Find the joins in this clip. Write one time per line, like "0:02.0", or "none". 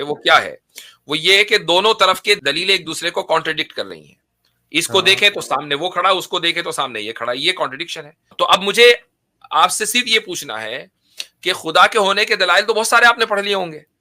0:02.4
0:08.3